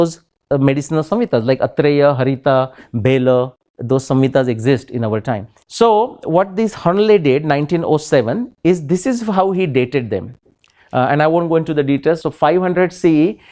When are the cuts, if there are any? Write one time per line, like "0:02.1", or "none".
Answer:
0:05.6
0:12.2

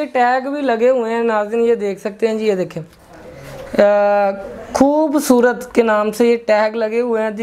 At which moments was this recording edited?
none

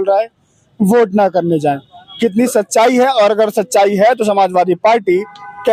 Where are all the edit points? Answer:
none

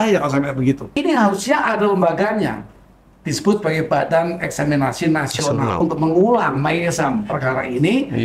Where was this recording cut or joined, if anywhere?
0:00.9
0:05.8

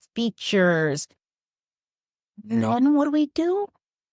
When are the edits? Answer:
none

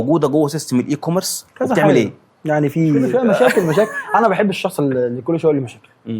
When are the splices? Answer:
0:03.1

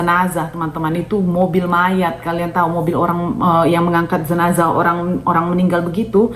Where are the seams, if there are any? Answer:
none

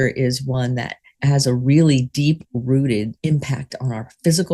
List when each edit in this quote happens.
0:01.2
0:03.2

